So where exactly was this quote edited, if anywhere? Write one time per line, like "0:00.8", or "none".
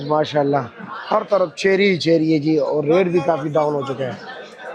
none